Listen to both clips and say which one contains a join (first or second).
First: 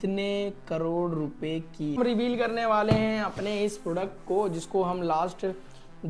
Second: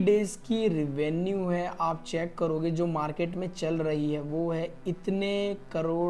first